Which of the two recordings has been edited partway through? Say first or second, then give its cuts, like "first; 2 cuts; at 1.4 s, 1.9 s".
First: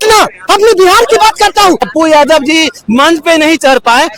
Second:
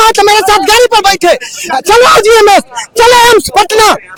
first; 1 cut; at 1.9 s